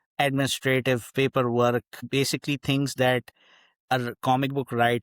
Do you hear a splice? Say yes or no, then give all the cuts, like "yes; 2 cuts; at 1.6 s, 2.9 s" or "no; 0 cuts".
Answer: yes; 1 cut; at 2.0 s